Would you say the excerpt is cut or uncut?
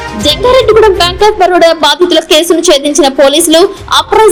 uncut